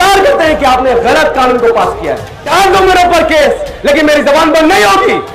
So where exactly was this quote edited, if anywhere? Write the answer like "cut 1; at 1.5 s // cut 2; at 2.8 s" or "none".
cut 1; at 2.3 s